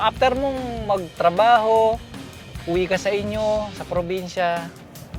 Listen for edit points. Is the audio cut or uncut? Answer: uncut